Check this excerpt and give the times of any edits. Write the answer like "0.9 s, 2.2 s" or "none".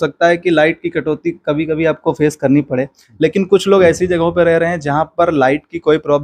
none